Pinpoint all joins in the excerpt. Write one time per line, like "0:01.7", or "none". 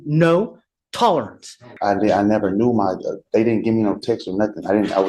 0:01.7